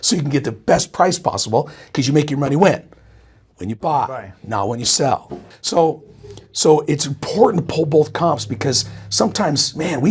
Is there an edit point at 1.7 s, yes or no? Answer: no